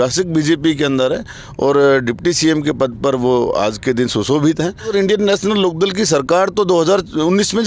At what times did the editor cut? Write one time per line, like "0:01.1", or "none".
0:04.9